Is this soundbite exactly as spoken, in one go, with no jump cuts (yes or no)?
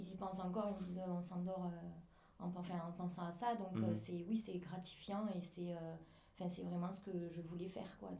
yes